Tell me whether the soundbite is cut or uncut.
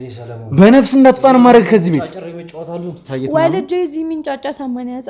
cut